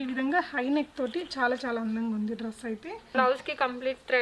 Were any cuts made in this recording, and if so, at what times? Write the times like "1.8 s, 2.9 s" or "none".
2.9 s